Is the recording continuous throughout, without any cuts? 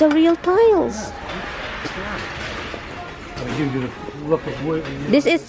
yes; 0 cuts

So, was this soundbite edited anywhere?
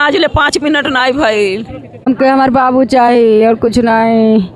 yes; 1 cut; at 2.0 s

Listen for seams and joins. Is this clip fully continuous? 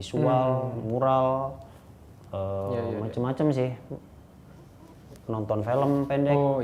yes; 0 cuts

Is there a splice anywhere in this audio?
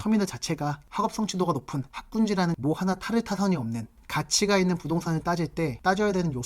yes; 2 cuts; at 0.8 s, 2.6 s

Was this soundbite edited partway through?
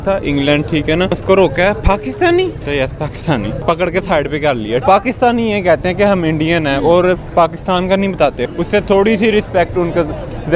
yes; 5 cuts; at 1.1 s, 2.6 s, 3.6 s, 4.8 s, 8.4 s

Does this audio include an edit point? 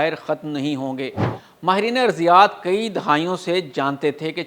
yes; 1 cut; at 1.3 s

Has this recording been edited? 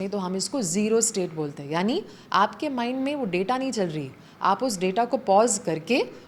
no; 0 cuts

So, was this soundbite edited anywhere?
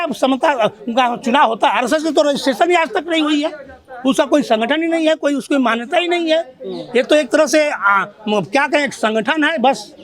no; 0 cuts

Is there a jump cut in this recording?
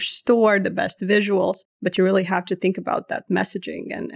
yes; 1 cut; at 1.7 s

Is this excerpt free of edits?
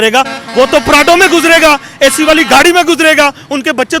yes; 0 cuts

